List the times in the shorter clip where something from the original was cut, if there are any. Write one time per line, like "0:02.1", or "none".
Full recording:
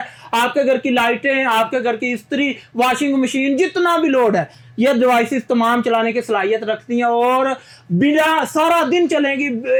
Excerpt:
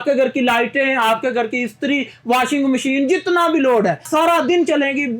0:04.1